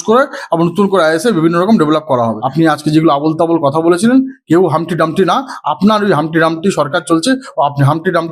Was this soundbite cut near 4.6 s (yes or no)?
no